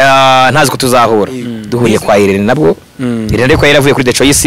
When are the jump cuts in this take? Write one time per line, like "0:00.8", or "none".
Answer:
0:01.6